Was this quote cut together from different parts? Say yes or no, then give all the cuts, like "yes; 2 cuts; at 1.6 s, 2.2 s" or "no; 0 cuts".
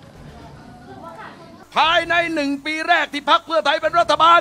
yes; 1 cut; at 1.6 s